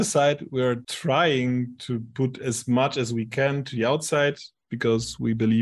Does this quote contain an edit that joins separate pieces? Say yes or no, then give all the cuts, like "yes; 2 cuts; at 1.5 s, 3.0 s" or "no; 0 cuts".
yes; 1 cut; at 0.9 s